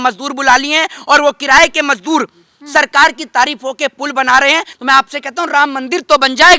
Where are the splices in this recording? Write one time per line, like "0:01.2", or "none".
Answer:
0:04.7